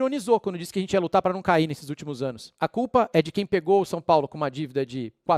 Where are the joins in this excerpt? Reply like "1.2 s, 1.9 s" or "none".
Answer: 2.5 s